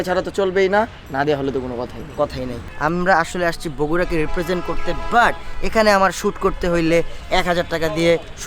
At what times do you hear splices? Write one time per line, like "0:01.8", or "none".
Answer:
0:02.7